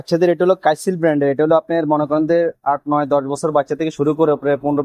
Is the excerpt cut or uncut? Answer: uncut